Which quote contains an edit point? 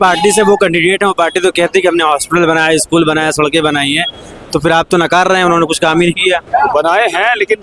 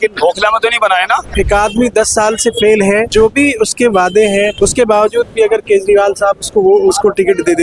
second; 3 cuts; at 1.3 s, 3.1 s, 4.5 s

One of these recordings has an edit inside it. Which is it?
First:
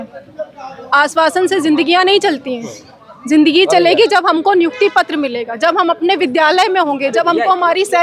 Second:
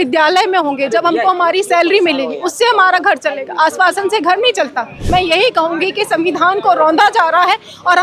second; 1 cut; at 5.0 s

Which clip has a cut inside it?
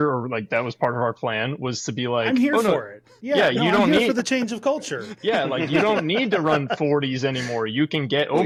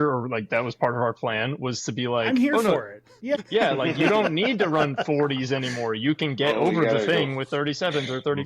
second; 1 cut; at 3.4 s

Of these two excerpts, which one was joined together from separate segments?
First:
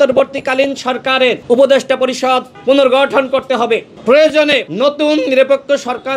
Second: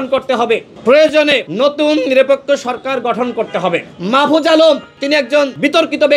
second; 2 cuts; at 3.9 s, 5.3 s

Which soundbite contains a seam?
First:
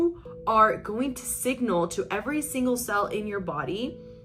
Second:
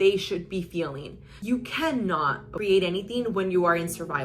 second; 2 cuts; at 1.3 s, 2.5 s

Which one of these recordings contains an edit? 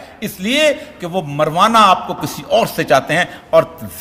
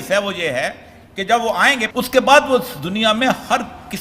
second; 1 cut; at 1.9 s

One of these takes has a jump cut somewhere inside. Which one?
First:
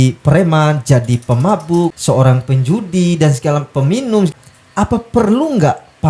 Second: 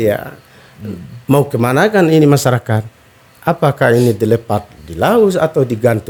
first; 2 cuts; at 2.0 s, 4.3 s

